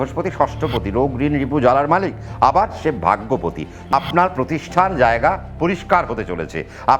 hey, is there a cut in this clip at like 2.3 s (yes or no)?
no